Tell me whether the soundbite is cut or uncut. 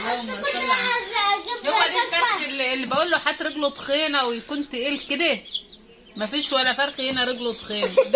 uncut